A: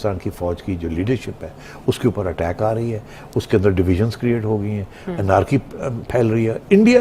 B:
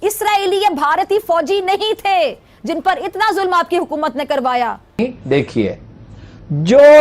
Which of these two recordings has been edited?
B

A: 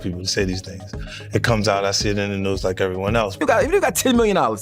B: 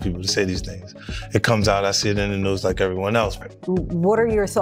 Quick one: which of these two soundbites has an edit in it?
A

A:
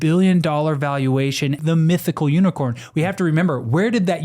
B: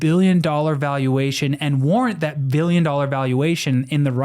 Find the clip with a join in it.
A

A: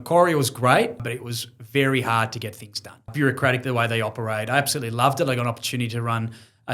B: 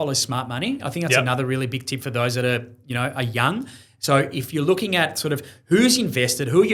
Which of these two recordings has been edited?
A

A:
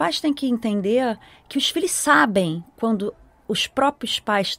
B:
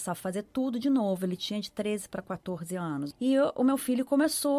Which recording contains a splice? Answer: B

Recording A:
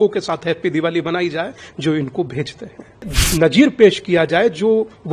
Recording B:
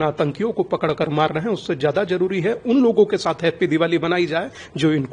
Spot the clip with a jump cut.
A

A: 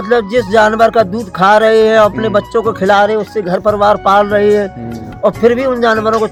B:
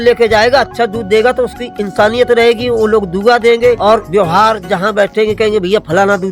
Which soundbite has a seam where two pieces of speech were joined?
B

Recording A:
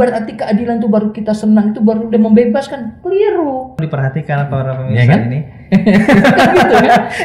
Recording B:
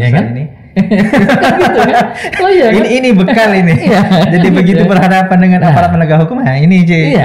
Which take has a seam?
A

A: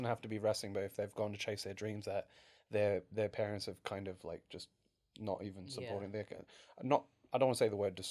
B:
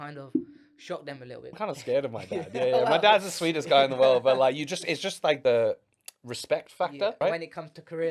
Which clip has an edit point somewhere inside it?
B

